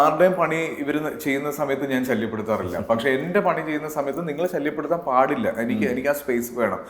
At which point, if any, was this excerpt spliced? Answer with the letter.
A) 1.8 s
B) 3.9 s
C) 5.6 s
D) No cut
D